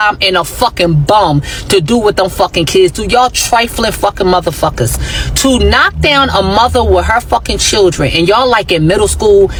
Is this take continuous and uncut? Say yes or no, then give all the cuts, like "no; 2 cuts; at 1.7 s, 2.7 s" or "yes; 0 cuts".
yes; 0 cuts